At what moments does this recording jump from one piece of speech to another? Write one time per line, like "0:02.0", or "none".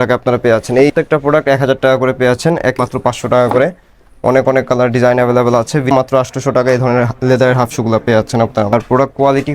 0:00.9
0:02.8
0:05.9
0:08.7